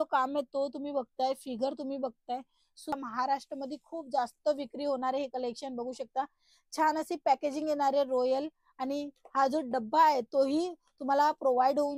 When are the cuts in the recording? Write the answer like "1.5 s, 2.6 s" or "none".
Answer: 2.9 s